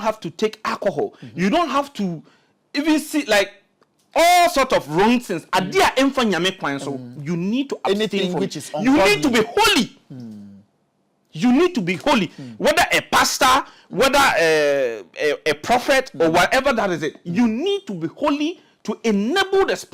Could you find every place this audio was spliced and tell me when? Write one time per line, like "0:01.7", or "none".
none